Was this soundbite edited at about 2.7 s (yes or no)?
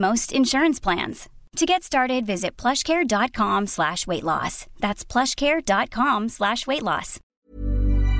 no